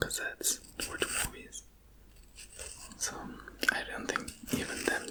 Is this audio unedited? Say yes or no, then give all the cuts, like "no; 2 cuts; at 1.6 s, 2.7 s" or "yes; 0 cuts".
yes; 0 cuts